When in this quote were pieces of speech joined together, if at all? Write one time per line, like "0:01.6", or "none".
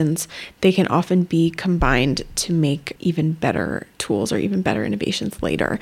0:03.9